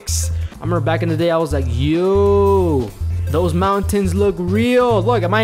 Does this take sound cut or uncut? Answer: uncut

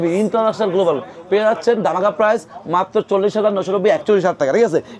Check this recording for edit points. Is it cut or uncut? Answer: uncut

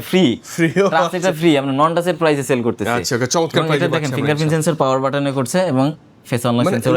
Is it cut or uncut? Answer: uncut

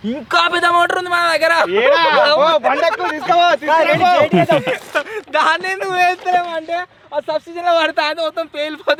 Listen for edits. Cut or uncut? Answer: uncut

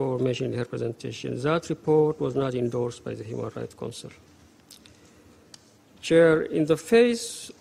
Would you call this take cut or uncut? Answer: uncut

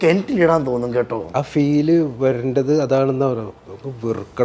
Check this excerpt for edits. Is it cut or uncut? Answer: cut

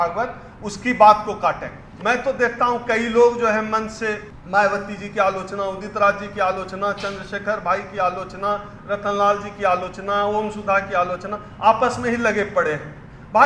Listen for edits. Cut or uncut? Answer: cut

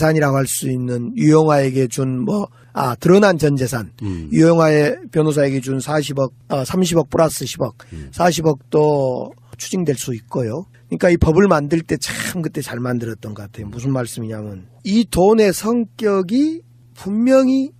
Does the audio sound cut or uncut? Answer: cut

